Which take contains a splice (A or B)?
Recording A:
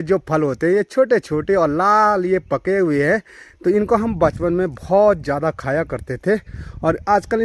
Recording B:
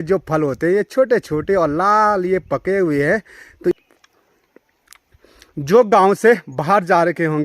B